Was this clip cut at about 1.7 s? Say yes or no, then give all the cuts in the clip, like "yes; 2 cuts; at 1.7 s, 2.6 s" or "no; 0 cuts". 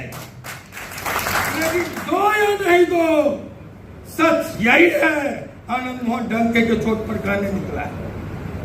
yes; 1 cut; at 1.7 s